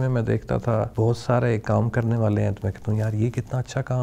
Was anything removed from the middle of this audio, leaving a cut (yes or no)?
yes